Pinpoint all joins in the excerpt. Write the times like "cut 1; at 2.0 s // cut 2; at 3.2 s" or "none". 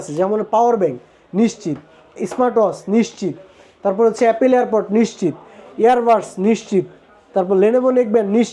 none